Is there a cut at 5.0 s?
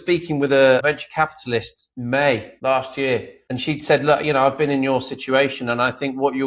no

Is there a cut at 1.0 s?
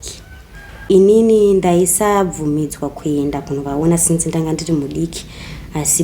yes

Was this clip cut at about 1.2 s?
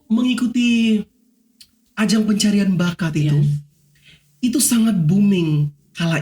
no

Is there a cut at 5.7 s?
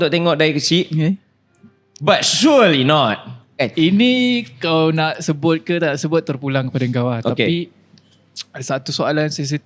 no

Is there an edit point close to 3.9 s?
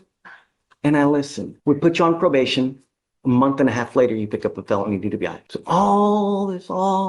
no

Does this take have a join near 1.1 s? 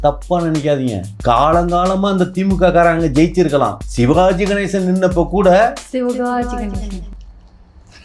yes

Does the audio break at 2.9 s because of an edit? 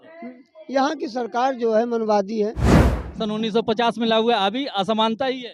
yes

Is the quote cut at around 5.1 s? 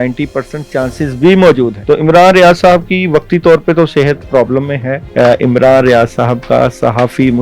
yes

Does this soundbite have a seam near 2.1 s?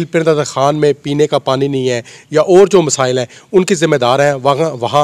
no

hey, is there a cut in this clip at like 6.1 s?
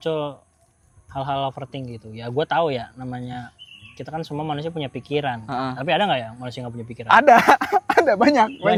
no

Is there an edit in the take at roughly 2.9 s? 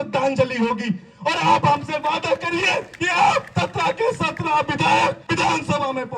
yes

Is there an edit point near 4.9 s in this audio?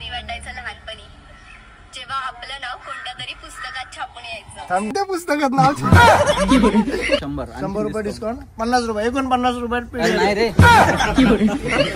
yes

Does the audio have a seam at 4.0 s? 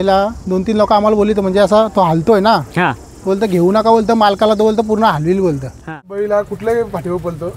no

